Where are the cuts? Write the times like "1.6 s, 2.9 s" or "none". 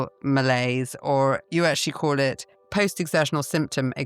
2.5 s